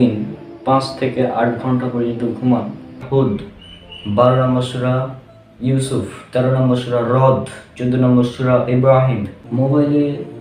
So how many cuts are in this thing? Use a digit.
2